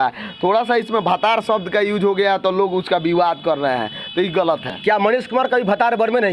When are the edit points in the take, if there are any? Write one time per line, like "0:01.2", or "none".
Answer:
none